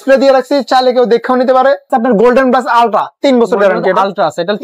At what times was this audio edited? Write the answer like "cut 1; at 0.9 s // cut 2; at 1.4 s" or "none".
cut 1; at 1.9 s

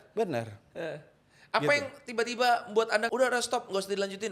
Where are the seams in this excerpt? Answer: cut 1; at 3.1 s

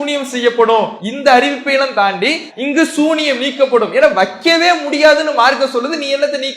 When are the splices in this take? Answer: cut 1; at 1.0 s // cut 2; at 2.5 s

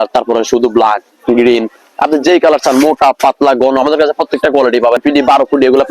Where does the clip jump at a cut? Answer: cut 1; at 5.0 s

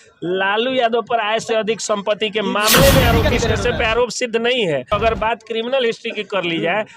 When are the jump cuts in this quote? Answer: cut 1; at 3.3 s // cut 2; at 5.0 s

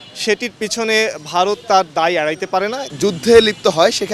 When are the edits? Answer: none

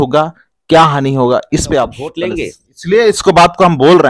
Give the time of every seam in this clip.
cut 1; at 2.3 s

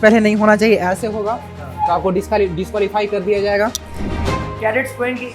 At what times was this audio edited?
cut 1; at 4.2 s

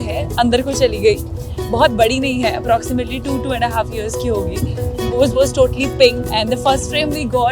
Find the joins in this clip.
cut 1; at 6.2 s

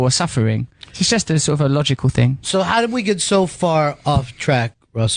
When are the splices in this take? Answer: cut 1; at 1.8 s

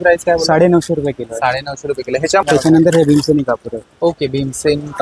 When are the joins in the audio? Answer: cut 1; at 2.4 s

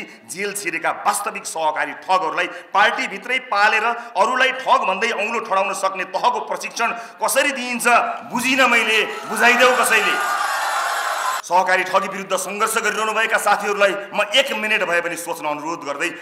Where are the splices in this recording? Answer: cut 1; at 11.4 s

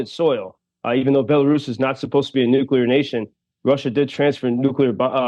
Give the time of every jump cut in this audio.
none

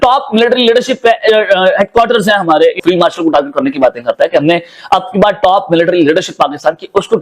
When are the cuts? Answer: cut 1; at 2.8 s

